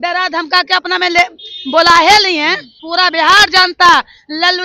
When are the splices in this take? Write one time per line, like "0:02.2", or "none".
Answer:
0:02.8